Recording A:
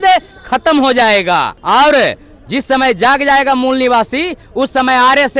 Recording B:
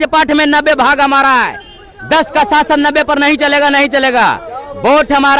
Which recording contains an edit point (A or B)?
A